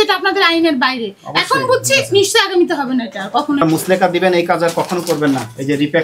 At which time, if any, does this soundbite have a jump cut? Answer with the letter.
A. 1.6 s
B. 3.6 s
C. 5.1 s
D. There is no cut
B